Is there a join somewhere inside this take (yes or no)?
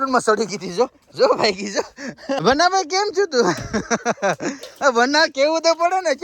yes